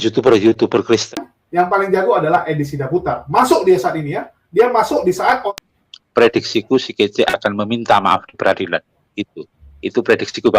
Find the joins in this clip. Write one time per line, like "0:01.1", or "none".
0:01.3
0:05.5